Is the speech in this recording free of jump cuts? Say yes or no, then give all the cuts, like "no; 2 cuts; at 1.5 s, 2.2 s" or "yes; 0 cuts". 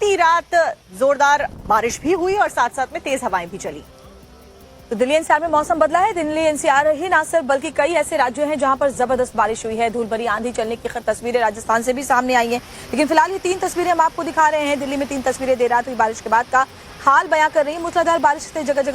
no; 1 cut; at 16.2 s